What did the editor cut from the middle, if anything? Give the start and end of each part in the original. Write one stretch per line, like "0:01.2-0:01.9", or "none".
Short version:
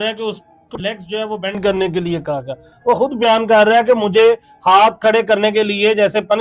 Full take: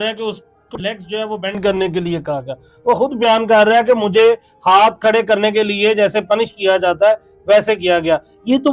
none